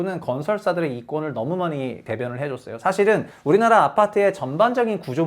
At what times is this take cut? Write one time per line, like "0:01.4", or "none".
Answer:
0:02.0
0:03.3